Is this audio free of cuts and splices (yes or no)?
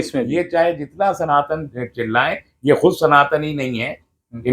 yes